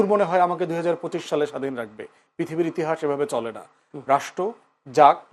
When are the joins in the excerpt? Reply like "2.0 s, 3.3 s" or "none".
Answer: 3.9 s